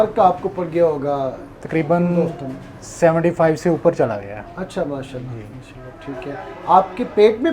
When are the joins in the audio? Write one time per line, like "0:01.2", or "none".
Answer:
none